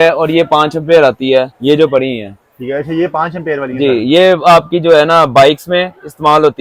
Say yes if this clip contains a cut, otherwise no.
no